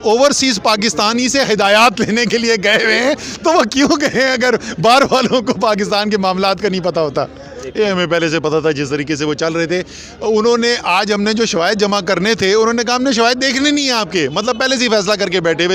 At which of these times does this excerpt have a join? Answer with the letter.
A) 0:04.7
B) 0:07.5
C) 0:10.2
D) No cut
B